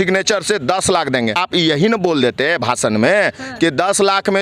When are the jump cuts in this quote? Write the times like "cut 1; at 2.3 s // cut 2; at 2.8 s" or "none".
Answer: cut 1; at 1.4 s